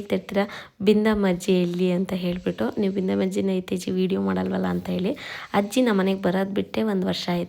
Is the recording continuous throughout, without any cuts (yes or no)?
yes